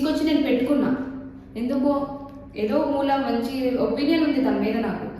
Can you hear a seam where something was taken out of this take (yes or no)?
no